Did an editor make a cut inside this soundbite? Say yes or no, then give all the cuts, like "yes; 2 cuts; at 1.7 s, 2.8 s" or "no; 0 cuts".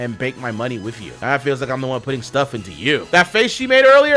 yes; 1 cut; at 3.0 s